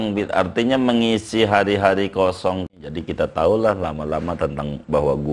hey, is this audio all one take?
no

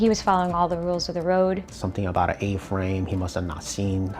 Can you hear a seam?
yes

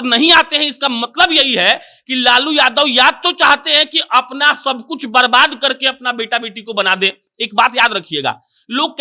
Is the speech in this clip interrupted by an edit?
no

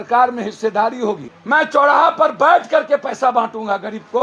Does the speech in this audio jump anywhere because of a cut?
yes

